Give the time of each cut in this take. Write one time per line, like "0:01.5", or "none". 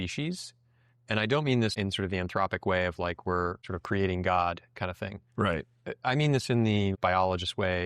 0:01.7
0:03.7
0:07.0